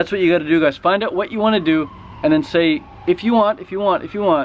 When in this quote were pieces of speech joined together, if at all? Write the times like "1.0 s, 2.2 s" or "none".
none